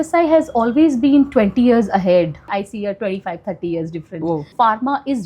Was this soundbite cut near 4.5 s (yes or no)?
yes